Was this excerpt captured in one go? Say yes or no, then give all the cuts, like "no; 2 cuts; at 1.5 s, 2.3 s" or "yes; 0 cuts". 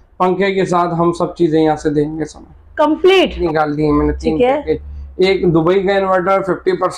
no; 1 cut; at 3.4 s